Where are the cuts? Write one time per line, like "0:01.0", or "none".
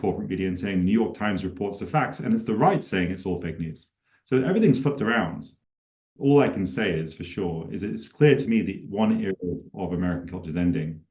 0:05.7